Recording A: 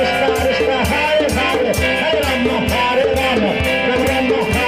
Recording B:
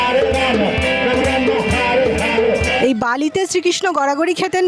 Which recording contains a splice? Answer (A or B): B